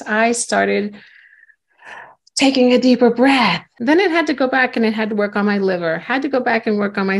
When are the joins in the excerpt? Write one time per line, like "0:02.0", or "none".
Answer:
0:03.7